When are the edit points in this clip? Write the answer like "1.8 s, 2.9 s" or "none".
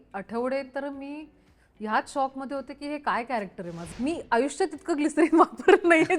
3.8 s